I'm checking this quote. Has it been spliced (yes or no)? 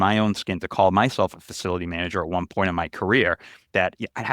no